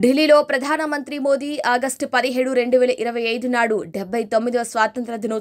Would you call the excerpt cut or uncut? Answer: uncut